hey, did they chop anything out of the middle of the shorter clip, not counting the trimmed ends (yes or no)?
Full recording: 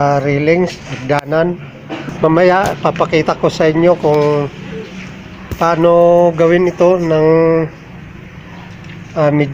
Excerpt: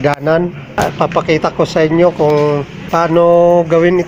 yes